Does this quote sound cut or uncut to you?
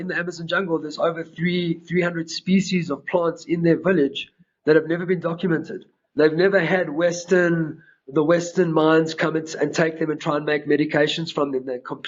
uncut